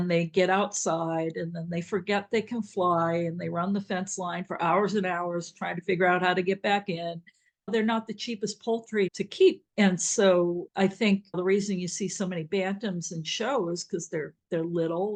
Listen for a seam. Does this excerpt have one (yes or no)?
no